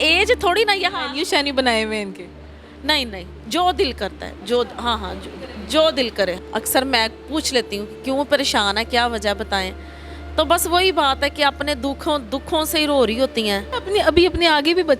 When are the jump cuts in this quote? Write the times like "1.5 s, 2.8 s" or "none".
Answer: 6.4 s, 13.7 s